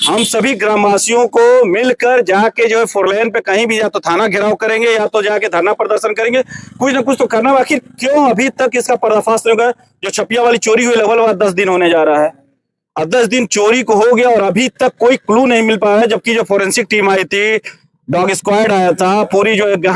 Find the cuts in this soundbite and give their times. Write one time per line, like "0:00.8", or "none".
none